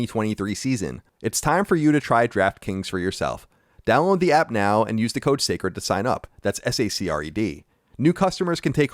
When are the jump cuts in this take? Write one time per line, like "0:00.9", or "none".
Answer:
0:01.0